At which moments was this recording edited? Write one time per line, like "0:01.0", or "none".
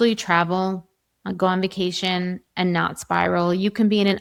none